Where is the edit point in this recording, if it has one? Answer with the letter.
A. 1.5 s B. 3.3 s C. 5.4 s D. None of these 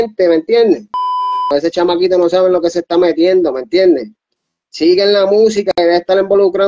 A